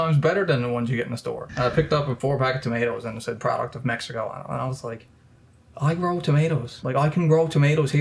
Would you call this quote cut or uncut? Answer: cut